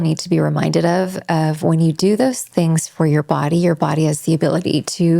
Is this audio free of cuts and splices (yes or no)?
yes